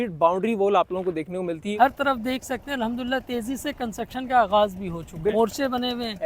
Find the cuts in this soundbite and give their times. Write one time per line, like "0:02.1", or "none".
0:01.7
0:05.3